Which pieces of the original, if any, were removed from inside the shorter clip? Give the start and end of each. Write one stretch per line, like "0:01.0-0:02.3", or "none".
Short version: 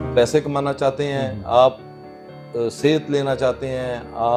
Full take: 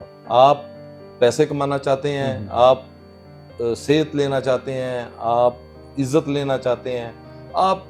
none